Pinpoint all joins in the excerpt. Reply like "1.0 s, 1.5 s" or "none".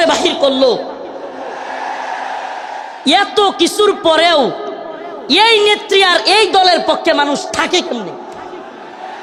none

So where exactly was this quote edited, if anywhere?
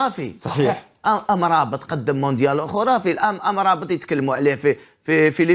none

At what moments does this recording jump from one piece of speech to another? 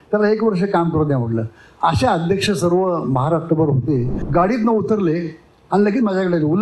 4.2 s

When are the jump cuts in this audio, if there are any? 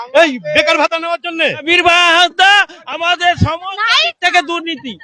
1.6 s

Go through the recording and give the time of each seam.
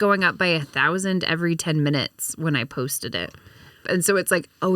3.8 s

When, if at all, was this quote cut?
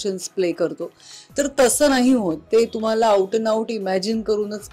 none

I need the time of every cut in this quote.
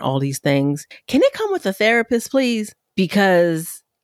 0.9 s, 2.8 s

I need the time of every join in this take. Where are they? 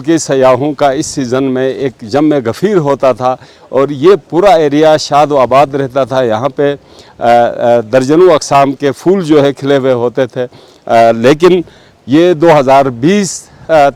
none

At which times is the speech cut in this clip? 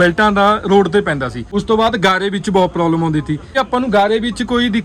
1.4 s, 3.6 s

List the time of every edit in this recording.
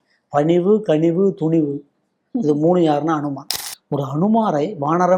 3.5 s

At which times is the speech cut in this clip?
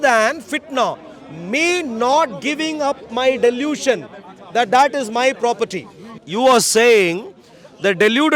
6.2 s

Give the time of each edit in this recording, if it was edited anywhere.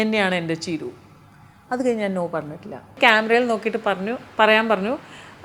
2.9 s

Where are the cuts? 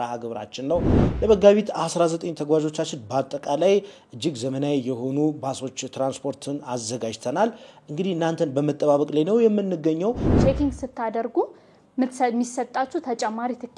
1.0 s, 10.3 s

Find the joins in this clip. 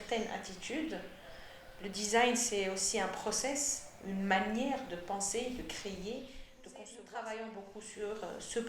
6.7 s

